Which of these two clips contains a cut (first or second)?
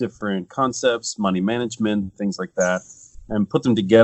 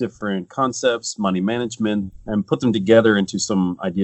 second